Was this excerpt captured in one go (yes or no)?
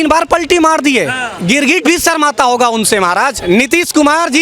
no